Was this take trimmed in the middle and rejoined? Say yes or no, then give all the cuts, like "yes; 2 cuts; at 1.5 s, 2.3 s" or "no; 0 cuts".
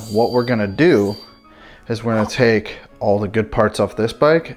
no; 0 cuts